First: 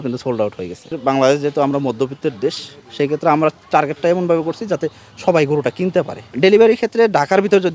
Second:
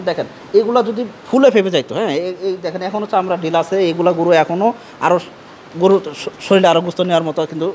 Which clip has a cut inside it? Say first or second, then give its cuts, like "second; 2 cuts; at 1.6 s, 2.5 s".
first; 2 cuts; at 1.0 s, 6.2 s